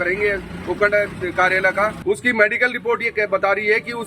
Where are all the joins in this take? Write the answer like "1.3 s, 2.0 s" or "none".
2.0 s

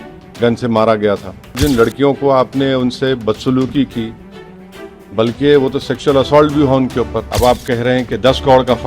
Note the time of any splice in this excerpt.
1.5 s, 7.3 s

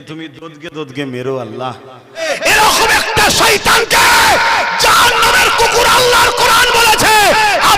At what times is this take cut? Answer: 2.2 s

